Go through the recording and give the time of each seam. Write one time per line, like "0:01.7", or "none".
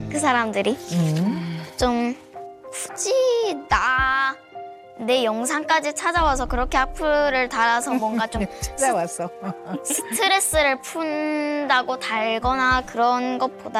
none

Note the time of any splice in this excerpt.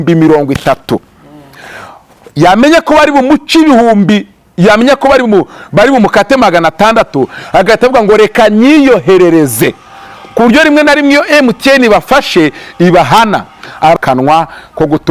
0:14.0

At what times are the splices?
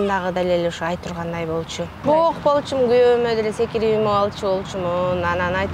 0:01.9

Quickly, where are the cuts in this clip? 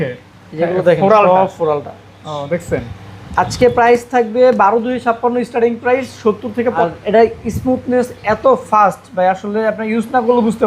0:06.8

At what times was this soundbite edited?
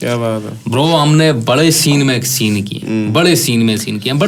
none

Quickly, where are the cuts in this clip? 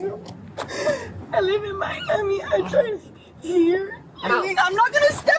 0:04.3

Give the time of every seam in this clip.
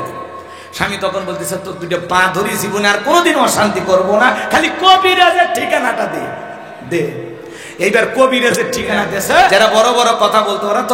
0:09.5

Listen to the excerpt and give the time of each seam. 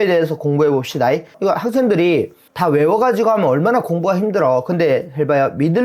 0:01.3

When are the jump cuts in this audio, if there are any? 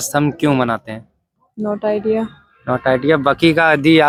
none

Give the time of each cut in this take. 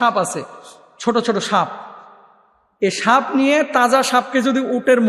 none

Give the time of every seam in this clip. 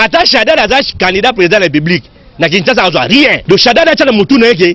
0:03.4

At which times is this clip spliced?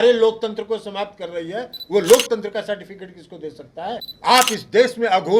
0:04.1

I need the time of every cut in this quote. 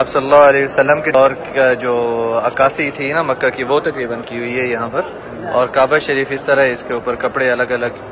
0:01.1

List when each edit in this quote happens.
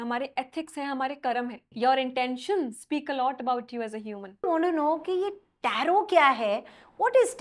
0:01.7
0:04.5

